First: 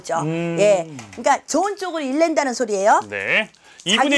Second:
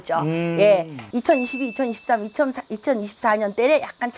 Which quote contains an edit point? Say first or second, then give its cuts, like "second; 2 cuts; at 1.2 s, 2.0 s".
second; 1 cut; at 1.0 s